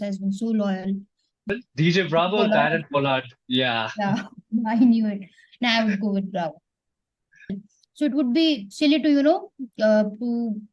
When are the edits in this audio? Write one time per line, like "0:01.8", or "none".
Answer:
0:01.4
0:07.6